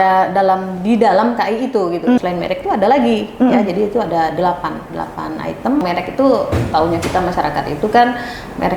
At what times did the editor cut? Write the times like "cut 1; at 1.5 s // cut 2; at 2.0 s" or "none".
cut 1; at 2.2 s // cut 2; at 5.8 s